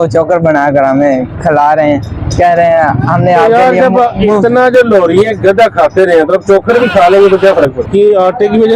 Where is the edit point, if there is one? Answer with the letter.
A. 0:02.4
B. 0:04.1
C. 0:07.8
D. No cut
C